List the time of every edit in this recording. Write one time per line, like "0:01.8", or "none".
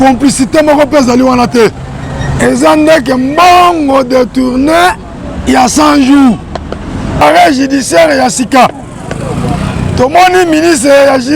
0:07.2